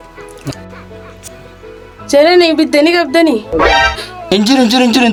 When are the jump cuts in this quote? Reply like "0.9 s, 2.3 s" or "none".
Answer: none